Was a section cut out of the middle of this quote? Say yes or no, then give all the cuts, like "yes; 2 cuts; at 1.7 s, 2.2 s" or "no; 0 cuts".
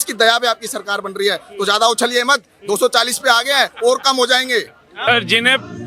yes; 1 cut; at 4.8 s